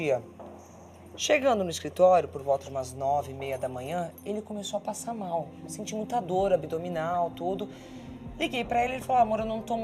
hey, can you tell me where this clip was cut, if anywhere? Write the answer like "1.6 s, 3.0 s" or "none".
none

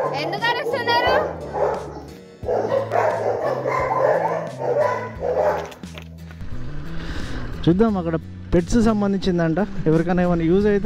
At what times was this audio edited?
6.2 s

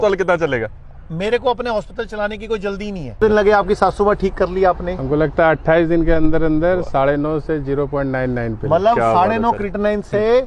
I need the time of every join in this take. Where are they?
3.2 s

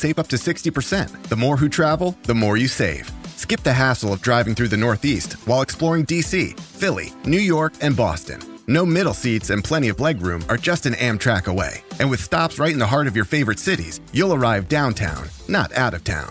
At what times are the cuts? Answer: none

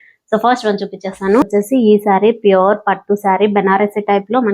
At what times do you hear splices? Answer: 1.5 s

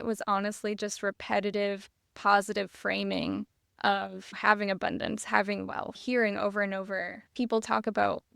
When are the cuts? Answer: 4.3 s, 6.0 s, 7.2 s

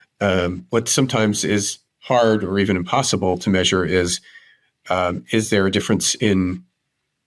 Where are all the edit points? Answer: none

